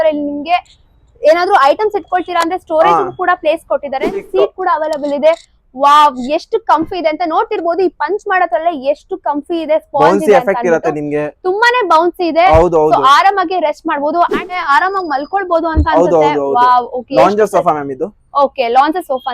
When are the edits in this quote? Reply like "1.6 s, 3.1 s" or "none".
4.2 s, 14.6 s